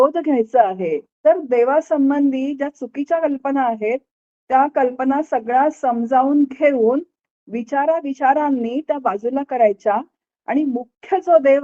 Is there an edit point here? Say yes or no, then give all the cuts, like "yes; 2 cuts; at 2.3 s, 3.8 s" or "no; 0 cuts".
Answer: yes; 1 cut; at 1.1 s